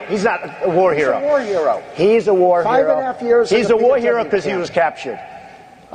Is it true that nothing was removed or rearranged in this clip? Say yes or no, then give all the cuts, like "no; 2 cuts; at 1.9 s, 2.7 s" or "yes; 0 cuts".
no; 1 cut; at 1.9 s